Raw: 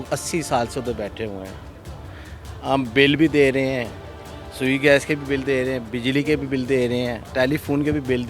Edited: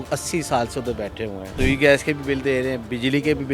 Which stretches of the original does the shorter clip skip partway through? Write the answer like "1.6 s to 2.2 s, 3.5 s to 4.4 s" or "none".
1.4 s to 4.4 s